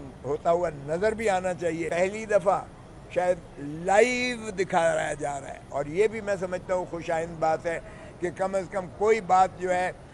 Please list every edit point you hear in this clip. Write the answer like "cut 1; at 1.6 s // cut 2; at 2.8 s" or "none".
cut 1; at 1.9 s